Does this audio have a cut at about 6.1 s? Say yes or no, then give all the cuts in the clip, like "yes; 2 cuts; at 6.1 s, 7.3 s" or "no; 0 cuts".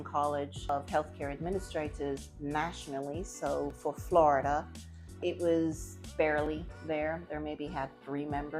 yes; 3 cuts; at 0.7 s, 5.2 s, 6.1 s